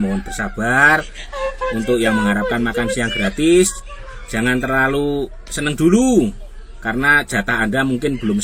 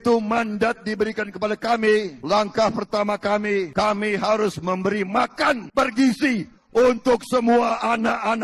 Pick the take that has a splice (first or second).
second